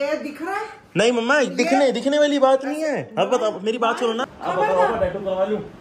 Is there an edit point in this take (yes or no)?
yes